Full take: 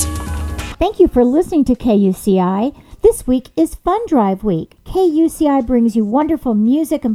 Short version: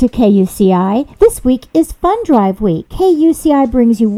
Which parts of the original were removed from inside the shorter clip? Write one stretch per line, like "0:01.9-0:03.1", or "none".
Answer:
0:02.8-0:02.9
0:04.7-0:04.8